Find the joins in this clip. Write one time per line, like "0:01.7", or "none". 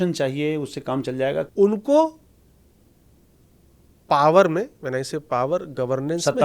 0:01.5